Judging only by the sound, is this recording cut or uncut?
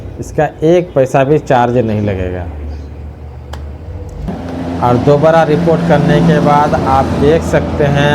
cut